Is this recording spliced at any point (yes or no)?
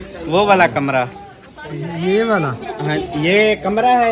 no